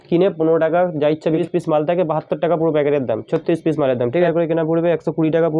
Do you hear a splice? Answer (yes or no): yes